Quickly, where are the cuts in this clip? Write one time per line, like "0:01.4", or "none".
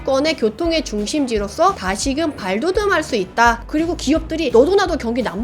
0:03.6